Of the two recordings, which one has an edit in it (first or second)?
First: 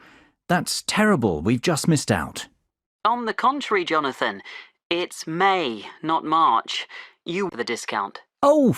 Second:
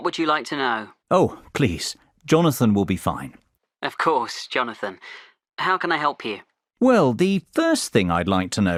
first